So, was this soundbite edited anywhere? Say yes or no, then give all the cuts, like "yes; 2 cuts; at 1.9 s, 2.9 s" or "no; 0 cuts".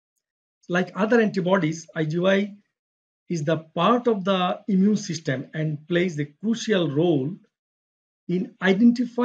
no; 0 cuts